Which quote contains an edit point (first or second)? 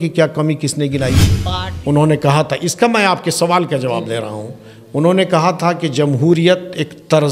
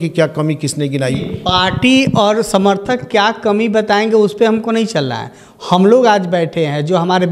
first